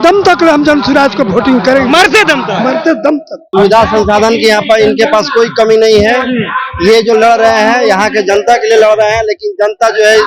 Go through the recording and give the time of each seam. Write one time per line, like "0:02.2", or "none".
0:03.4